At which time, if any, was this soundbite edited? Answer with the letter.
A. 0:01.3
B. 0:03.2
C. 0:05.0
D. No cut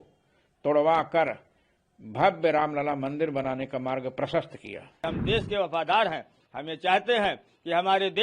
C